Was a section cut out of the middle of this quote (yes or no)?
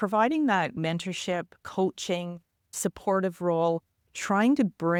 no